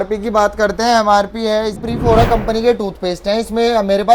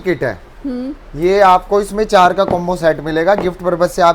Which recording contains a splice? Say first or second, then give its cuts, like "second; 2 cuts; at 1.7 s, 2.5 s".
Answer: first; 1 cut; at 1.8 s